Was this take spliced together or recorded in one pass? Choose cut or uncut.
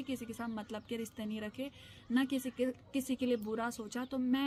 uncut